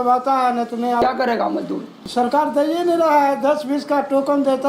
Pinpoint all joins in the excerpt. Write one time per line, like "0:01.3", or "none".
0:01.0
0:01.9